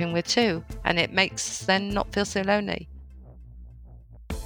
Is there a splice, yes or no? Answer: yes